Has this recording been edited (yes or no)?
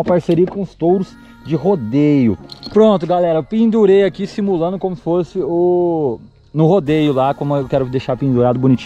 yes